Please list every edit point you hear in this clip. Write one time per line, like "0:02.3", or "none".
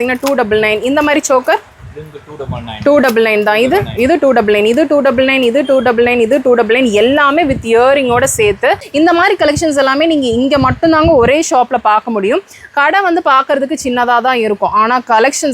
0:08.8